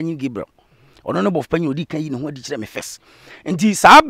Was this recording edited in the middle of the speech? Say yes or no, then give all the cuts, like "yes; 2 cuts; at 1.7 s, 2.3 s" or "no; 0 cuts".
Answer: no; 0 cuts